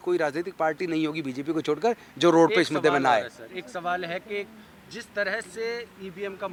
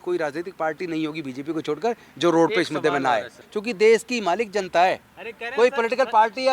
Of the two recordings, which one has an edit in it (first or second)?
second